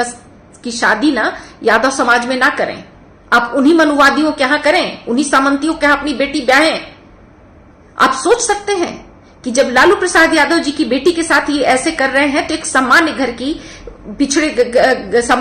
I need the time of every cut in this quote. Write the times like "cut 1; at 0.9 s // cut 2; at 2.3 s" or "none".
none